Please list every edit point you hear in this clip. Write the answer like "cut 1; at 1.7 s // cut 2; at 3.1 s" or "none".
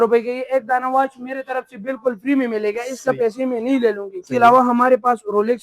cut 1; at 4.2 s